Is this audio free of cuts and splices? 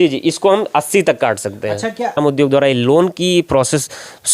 no; 1 cut; at 2.2 s

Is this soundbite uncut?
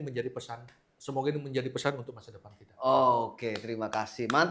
yes; 0 cuts

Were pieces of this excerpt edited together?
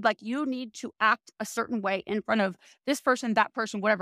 no; 0 cuts

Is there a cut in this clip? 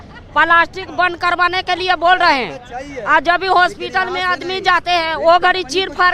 no; 0 cuts

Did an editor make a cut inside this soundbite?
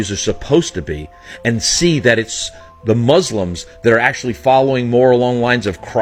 no; 0 cuts

